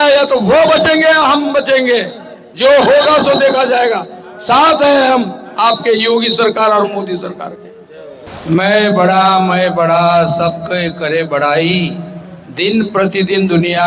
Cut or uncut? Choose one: cut